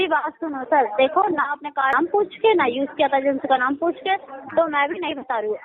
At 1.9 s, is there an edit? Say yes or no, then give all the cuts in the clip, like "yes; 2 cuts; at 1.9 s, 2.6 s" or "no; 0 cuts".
yes; 1 cut; at 1.9 s